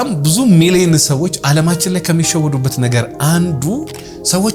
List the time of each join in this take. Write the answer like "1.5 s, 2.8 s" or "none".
none